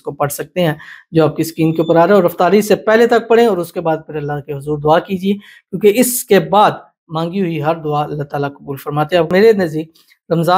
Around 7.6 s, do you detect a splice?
no; 1 cut; at 9.3 s

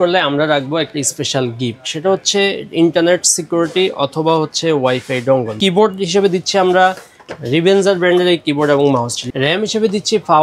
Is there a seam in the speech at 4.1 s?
no; 2 cuts; at 5.5 s, 9.2 s

